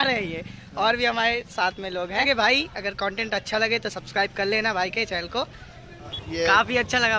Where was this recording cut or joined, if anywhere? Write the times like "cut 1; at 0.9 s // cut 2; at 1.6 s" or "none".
cut 1; at 2.3 s // cut 2; at 6.2 s